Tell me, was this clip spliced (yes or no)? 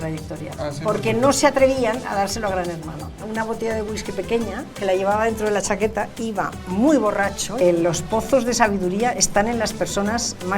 yes